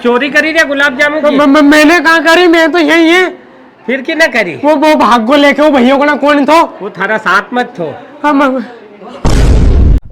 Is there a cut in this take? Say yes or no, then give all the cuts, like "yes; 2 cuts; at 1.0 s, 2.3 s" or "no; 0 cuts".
yes; 1 cut; at 8.6 s